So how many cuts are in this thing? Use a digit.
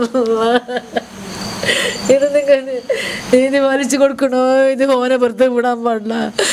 0